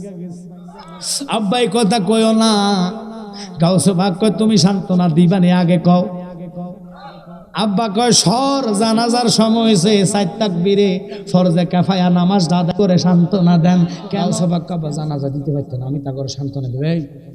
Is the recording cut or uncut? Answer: cut